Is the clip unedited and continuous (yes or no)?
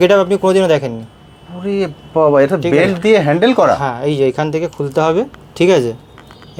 yes